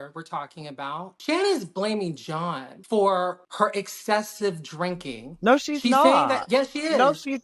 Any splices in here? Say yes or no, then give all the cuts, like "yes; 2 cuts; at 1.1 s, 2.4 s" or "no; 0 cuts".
yes; 1 cut; at 1.1 s